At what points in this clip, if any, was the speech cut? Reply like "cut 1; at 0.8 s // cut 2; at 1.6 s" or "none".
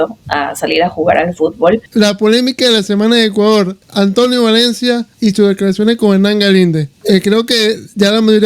cut 1; at 1.9 s // cut 2; at 3.8 s // cut 3; at 5.1 s // cut 4; at 6.9 s